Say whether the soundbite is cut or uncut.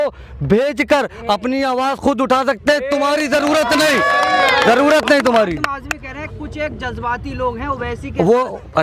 uncut